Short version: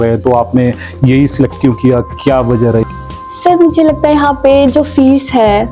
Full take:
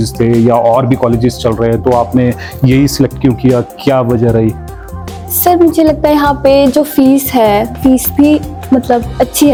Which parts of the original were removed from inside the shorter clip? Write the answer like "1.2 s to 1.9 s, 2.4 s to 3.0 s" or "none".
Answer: 4.4 s to 4.8 s